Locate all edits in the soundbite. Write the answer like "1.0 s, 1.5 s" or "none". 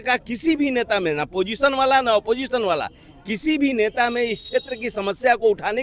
none